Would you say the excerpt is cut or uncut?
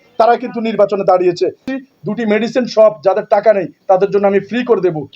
cut